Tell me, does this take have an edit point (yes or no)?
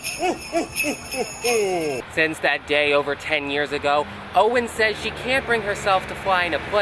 yes